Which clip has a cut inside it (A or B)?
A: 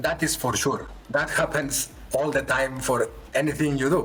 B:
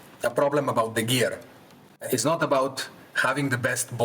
B